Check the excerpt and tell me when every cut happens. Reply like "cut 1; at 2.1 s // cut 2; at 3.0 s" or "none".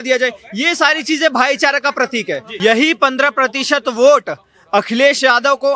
cut 1; at 2.4 s